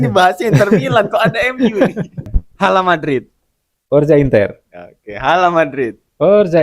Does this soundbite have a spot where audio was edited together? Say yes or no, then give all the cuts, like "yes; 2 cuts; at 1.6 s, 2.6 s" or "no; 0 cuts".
yes; 1 cut; at 2.4 s